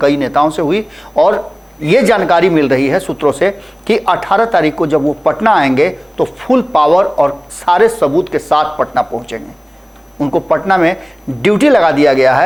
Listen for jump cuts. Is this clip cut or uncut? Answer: uncut